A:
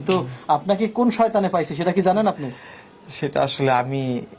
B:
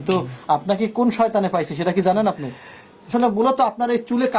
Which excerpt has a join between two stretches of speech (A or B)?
B